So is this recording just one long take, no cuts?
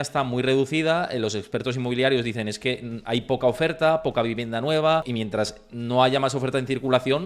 no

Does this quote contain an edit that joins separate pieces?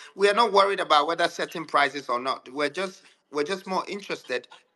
no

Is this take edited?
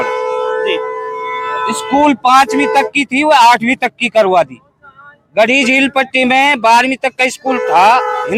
no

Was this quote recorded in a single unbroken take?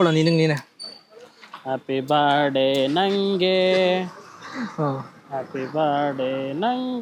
yes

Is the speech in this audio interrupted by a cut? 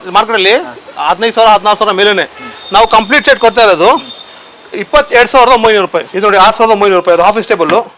yes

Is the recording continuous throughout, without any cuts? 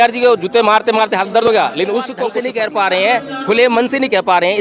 no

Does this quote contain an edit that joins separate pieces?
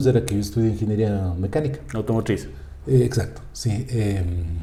no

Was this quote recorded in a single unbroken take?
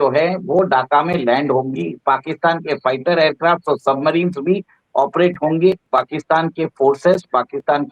no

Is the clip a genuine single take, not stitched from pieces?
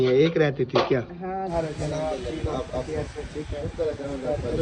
no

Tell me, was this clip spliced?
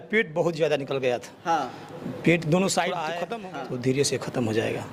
no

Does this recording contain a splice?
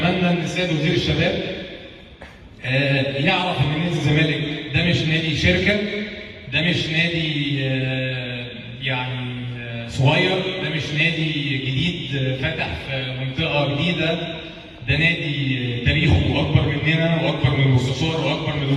no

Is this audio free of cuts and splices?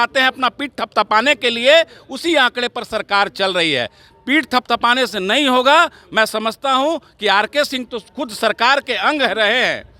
yes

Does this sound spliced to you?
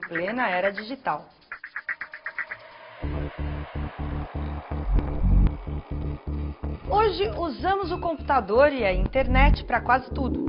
no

